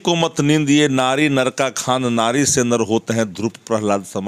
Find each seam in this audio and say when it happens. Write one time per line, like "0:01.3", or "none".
none